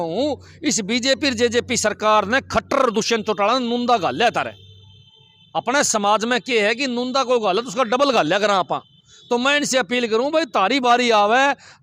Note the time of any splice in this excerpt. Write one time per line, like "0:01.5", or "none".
none